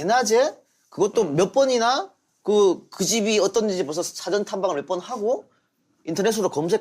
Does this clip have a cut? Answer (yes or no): yes